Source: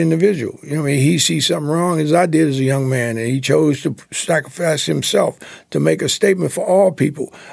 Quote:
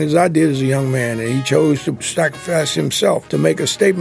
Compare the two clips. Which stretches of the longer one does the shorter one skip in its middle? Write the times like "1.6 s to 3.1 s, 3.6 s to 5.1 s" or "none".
4.0 s to 4.1 s, 5.4 s to 5.7 s